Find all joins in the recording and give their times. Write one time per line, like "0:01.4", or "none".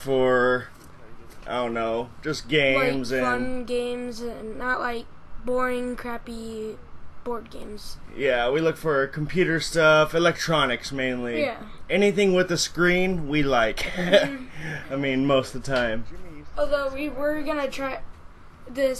none